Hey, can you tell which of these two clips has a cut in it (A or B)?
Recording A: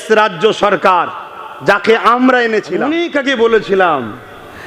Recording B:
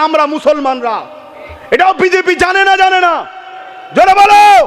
A